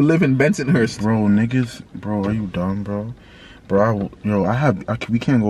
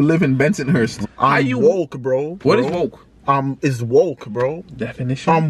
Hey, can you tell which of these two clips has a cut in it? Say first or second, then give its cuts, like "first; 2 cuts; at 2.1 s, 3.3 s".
second; 3 cuts; at 1.0 s, 2.4 s, 4.6 s